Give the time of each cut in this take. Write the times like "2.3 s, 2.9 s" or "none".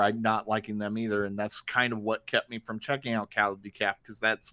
none